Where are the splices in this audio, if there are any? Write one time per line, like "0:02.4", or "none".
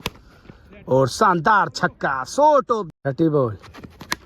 0:02.9